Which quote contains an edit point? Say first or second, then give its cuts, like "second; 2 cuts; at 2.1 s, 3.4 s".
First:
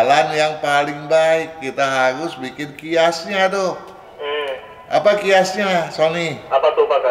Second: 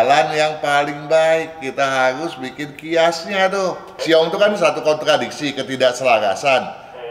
second; 1 cut; at 3.9 s